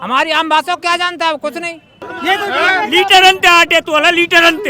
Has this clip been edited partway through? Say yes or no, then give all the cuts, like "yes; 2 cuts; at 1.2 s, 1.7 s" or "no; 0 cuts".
yes; 1 cut; at 2.1 s